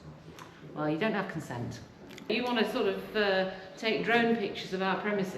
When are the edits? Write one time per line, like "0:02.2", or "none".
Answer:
0:02.2